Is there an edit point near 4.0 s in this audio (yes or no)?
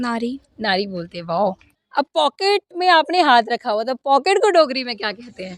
no